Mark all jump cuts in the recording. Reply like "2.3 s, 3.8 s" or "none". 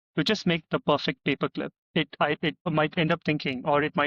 1.8 s, 2.7 s